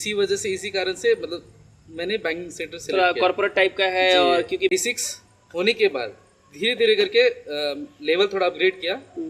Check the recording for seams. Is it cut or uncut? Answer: cut